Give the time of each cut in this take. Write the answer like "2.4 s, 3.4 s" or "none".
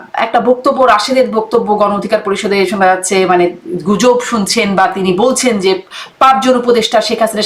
none